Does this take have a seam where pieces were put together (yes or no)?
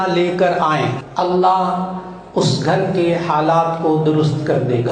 yes